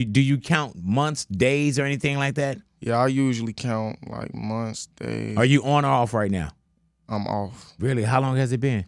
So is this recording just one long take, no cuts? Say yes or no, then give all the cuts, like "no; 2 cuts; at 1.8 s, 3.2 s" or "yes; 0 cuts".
yes; 0 cuts